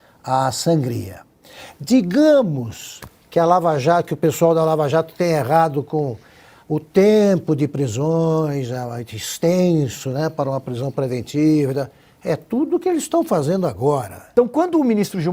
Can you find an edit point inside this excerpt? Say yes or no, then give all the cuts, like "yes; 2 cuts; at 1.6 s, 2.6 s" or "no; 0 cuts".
yes; 1 cut; at 14.2 s